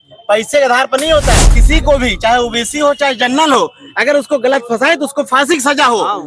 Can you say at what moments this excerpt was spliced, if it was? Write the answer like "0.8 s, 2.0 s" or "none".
1.5 s